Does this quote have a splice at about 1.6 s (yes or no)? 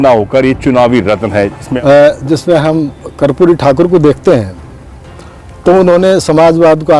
yes